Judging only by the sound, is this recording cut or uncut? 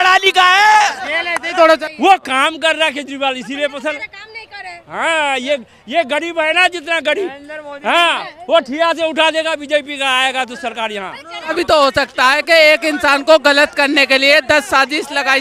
cut